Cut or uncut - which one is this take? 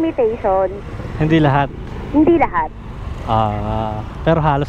uncut